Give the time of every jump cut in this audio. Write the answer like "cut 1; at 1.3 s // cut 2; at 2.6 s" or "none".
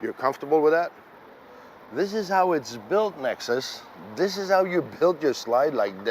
cut 1; at 1.0 s